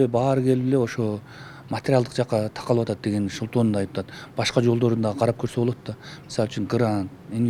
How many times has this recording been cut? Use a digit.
0